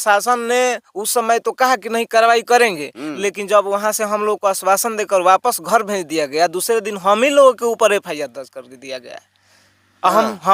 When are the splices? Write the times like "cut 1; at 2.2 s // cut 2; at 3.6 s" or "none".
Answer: none